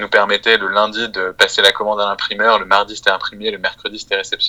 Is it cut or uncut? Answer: uncut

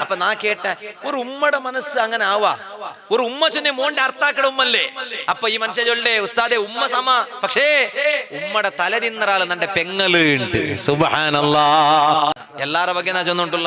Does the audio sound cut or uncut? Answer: cut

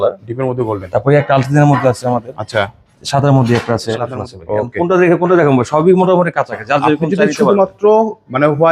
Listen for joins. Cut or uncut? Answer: cut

